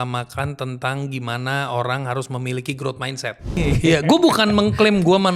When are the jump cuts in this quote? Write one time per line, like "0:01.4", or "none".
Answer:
0:03.6